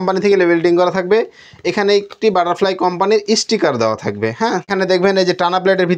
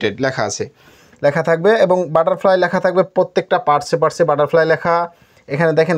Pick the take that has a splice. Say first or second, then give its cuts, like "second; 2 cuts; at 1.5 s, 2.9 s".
first; 1 cut; at 4.7 s